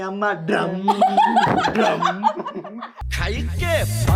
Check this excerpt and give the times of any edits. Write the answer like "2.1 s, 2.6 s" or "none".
none